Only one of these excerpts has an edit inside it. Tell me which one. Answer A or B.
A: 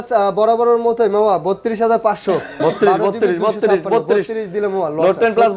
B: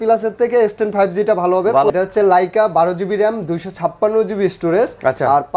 B